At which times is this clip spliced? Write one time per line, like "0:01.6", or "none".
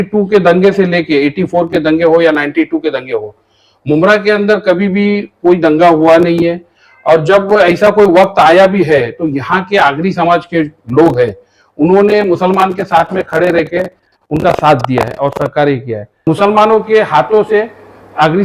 0:16.2